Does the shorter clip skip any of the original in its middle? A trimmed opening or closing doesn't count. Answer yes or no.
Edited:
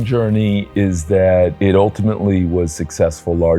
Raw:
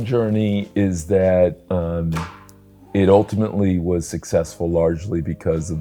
yes